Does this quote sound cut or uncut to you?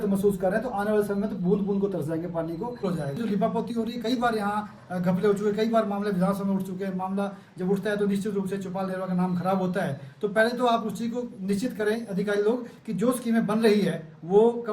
cut